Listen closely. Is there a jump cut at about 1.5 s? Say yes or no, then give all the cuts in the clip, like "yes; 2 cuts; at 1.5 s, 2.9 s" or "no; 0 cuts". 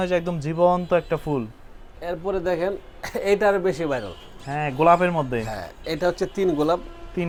no; 0 cuts